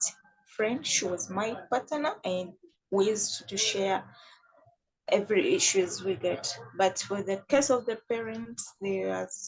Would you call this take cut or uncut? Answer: uncut